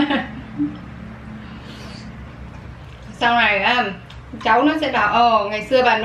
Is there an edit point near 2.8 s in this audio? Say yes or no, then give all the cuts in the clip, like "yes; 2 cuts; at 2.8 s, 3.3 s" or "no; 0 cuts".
yes; 1 cut; at 2.8 s